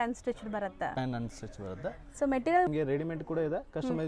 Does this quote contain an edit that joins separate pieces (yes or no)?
yes